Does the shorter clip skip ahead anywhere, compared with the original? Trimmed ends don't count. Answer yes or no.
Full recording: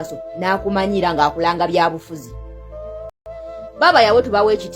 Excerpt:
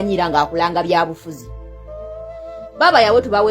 yes